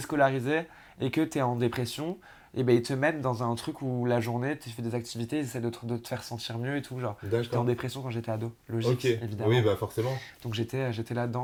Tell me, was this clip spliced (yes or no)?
no